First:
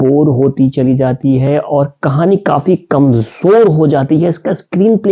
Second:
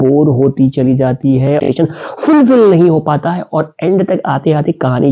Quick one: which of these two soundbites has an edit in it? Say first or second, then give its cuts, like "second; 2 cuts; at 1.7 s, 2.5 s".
second; 1 cut; at 1.7 s